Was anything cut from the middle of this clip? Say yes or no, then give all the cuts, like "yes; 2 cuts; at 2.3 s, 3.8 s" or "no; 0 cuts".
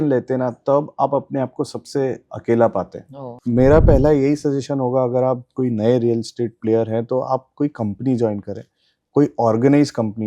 yes; 1 cut; at 3.3 s